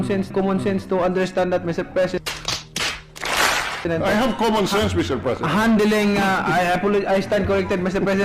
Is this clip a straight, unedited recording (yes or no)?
yes